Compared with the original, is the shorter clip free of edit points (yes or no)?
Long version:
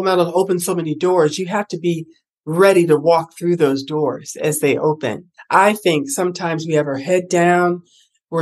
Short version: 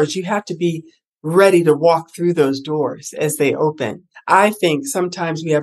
yes